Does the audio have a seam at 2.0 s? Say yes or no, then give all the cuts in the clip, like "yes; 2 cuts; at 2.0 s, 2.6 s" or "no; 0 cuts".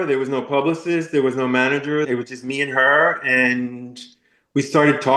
yes; 1 cut; at 2.0 s